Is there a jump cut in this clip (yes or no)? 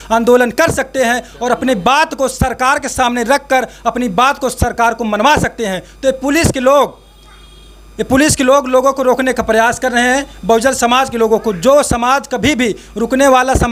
no